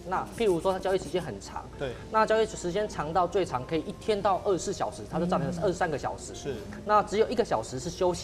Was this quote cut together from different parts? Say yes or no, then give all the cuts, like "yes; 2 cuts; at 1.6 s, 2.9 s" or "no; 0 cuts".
no; 0 cuts